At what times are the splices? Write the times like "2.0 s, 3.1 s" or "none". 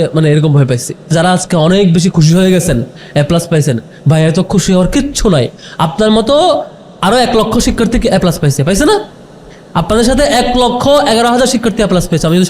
1.1 s